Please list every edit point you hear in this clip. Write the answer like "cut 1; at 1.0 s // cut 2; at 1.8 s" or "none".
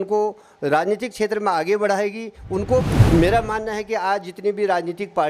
cut 1; at 2.9 s